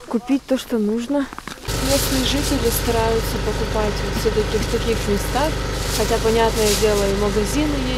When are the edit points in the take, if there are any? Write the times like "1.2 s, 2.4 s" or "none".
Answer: 1.7 s